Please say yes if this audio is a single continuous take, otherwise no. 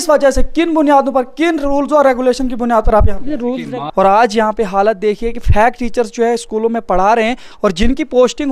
no